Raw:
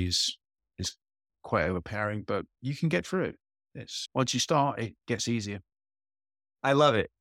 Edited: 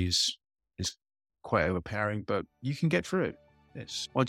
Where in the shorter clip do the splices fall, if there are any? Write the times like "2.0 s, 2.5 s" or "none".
none